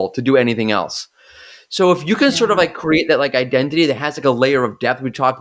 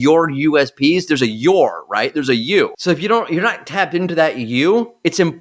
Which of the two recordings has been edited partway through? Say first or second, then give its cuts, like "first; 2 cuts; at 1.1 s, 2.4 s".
second; 1 cut; at 2.7 s